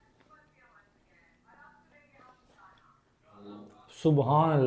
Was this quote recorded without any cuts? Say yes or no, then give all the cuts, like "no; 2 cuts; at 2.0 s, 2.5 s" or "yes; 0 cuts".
yes; 0 cuts